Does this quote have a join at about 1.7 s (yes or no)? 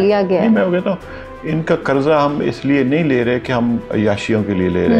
no